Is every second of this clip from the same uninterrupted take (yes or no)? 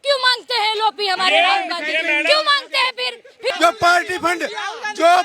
no